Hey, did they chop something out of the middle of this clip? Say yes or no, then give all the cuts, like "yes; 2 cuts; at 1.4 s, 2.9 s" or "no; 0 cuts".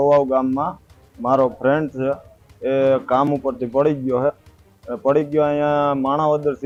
no; 0 cuts